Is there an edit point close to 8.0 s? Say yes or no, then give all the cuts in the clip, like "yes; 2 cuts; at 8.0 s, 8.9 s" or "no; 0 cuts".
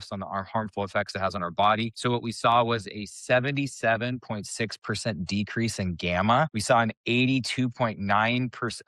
no; 2 cuts; at 1.9 s, 6.6 s